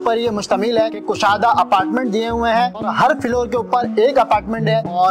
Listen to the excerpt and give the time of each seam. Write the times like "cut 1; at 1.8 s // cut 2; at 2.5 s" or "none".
cut 1; at 1.0 s